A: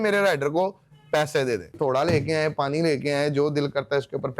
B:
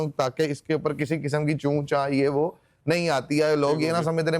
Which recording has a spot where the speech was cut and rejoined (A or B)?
A